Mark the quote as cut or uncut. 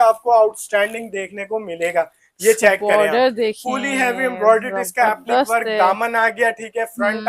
uncut